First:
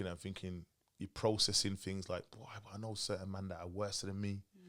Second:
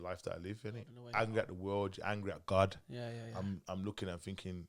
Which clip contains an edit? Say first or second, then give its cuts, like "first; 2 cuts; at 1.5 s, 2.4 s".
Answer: second; 1 cut; at 1.0 s